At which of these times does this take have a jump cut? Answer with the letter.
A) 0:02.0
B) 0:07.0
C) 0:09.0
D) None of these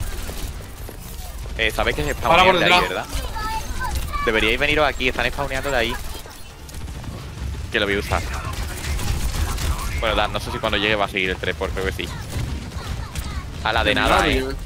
B